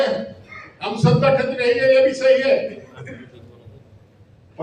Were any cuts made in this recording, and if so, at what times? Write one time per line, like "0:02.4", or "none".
none